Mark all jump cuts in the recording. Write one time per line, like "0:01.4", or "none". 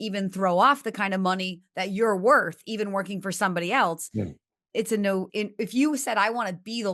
0:05.3